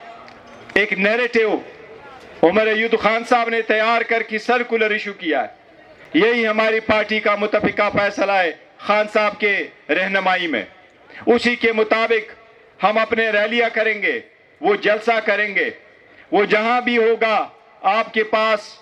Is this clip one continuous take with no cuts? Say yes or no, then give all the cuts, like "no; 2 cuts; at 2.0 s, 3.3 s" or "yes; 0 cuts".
yes; 0 cuts